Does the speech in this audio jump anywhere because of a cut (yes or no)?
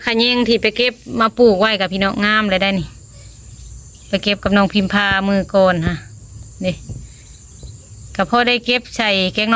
no